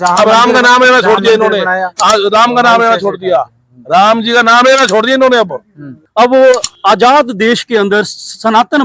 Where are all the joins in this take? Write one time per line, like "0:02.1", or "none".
0:06.0